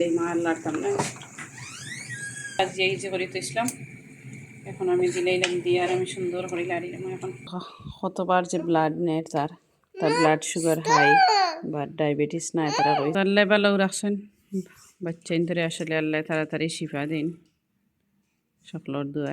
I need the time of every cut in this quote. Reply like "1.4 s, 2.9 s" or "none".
2.6 s, 7.7 s, 13.1 s

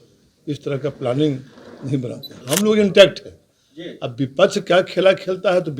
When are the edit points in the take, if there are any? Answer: 2.4 s

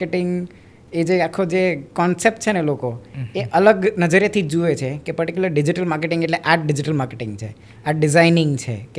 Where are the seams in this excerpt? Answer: none

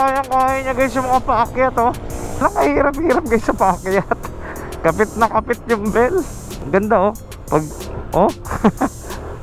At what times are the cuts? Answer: 2.4 s

